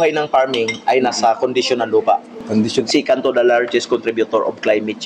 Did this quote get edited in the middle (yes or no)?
yes